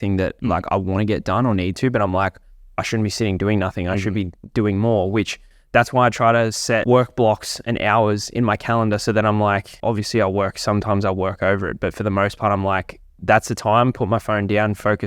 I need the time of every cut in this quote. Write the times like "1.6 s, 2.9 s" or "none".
6.8 s, 9.7 s